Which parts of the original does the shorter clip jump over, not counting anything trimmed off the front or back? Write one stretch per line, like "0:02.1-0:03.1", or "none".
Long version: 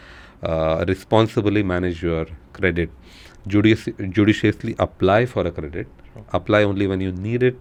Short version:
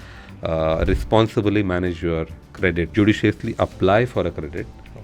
0:02.9-0:04.1